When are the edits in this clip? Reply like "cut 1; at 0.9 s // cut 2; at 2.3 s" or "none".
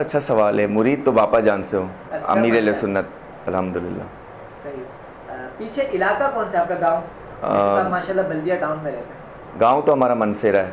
none